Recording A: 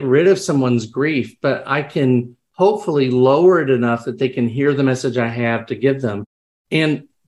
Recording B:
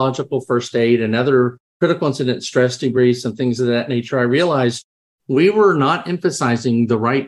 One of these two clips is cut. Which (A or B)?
B